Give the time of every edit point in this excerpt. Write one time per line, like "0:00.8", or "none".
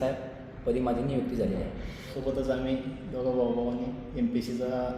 0:02.1